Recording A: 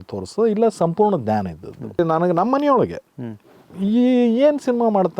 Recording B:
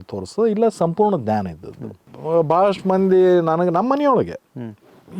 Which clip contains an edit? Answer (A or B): A